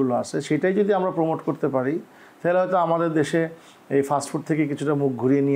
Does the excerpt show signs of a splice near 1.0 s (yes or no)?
no